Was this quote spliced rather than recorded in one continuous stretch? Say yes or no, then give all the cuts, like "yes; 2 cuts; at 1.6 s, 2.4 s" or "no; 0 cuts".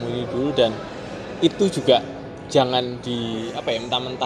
no; 0 cuts